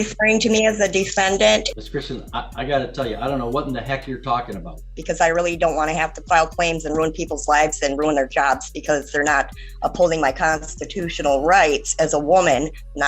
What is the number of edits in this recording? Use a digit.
2